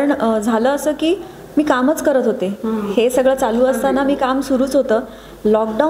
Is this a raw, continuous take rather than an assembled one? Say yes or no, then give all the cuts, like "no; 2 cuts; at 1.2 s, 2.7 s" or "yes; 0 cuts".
yes; 0 cuts